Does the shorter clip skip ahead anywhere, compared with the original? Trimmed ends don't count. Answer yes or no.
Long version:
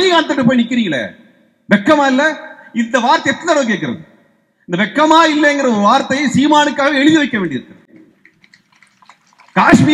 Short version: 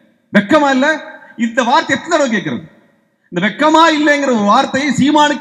no